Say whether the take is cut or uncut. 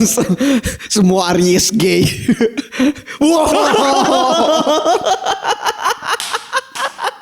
uncut